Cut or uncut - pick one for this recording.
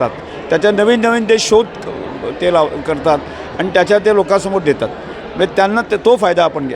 uncut